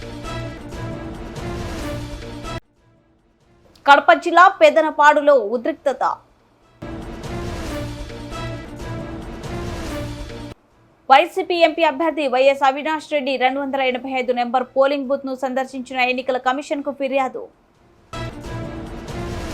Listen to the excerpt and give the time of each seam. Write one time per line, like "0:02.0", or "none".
0:02.3
0:02.8

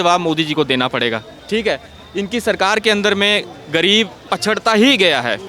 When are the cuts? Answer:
none

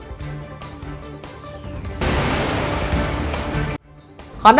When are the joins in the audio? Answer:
0:01.9
0:03.5

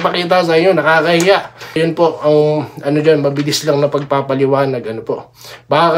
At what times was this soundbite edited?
0:01.8

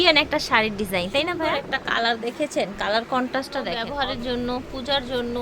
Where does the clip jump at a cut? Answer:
0:01.5
0:03.8

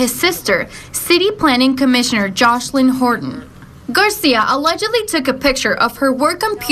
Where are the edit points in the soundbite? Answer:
0:01.0
0:05.4

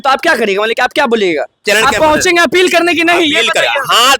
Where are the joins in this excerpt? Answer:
0:01.6

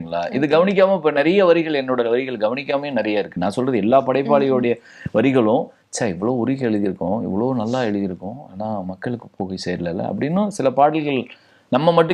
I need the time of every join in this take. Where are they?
none

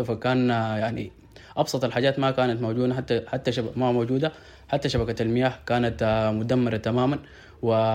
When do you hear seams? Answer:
none

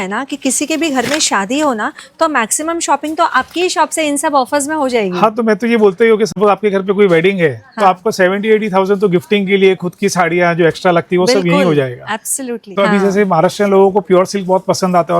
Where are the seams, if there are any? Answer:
none

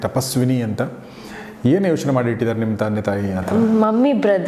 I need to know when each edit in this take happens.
none

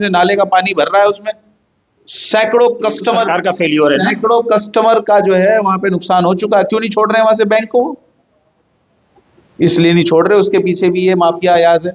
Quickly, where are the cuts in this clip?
none

